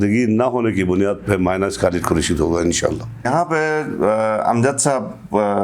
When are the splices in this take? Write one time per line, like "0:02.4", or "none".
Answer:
0:03.3